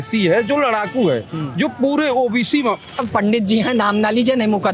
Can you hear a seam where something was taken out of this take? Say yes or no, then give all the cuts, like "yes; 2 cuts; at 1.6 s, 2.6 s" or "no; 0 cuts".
yes; 1 cut; at 3.0 s